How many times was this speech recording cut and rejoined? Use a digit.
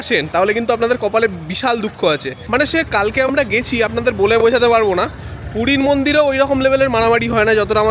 1